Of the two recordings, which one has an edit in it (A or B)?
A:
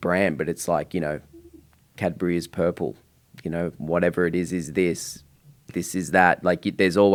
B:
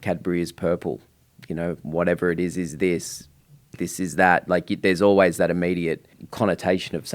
B